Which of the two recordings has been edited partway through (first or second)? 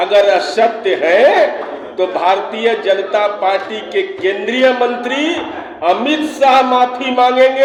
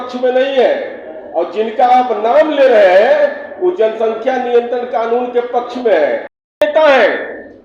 second